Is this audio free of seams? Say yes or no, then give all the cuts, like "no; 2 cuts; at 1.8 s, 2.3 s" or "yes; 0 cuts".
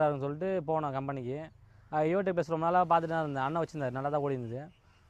yes; 0 cuts